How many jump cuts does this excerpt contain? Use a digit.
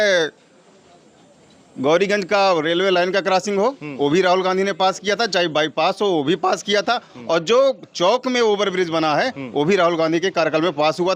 0